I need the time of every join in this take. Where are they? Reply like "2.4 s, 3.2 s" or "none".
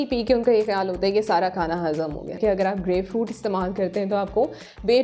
2.4 s